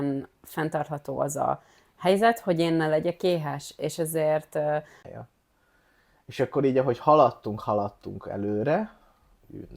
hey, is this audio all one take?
no; 1 cut; at 5.0 s

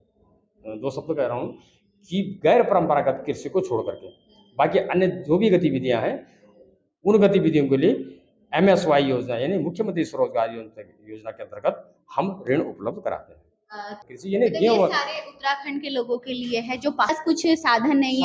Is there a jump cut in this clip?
yes; 2 cuts; at 14.1 s, 17.1 s

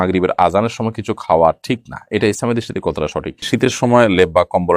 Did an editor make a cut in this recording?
yes; 1 cut; at 3.4 s

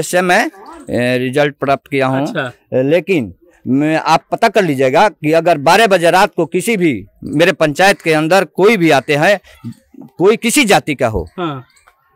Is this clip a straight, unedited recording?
yes; 0 cuts

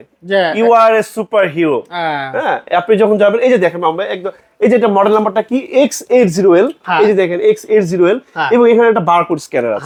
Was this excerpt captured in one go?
yes; 0 cuts

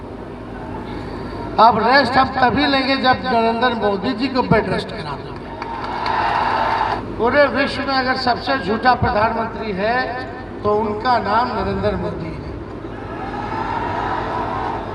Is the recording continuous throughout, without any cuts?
no; 1 cut; at 7.0 s

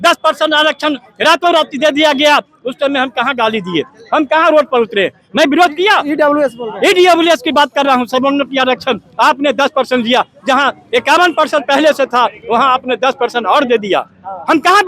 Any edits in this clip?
no; 0 cuts

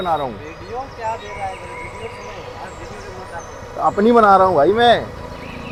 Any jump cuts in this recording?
no; 0 cuts

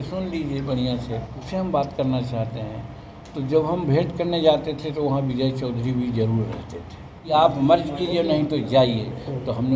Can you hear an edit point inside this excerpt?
yes; 2 cuts; at 1.4 s, 7.2 s

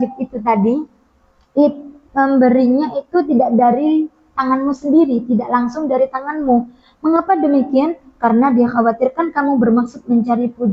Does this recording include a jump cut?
no; 0 cuts

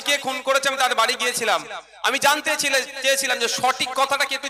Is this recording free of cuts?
yes; 0 cuts

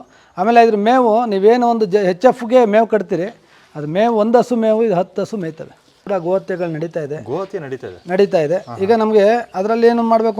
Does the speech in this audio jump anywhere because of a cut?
yes; 1 cut; at 6.0 s

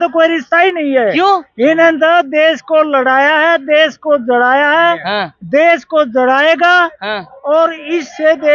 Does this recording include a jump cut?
no; 0 cuts

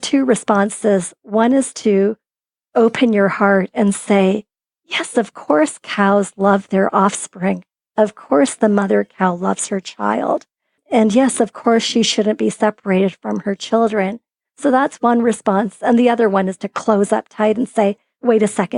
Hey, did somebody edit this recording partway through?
yes; 1 cut; at 10.8 s

